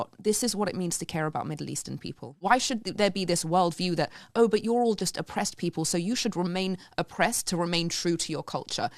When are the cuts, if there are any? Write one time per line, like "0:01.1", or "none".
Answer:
0:02.3